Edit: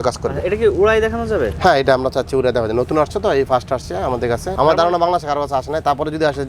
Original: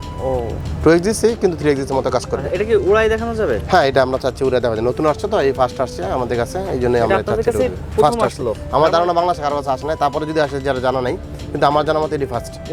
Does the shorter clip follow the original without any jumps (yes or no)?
no